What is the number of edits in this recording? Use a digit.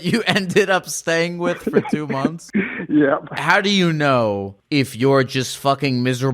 3